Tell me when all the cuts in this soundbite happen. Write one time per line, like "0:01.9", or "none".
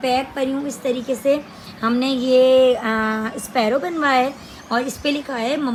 none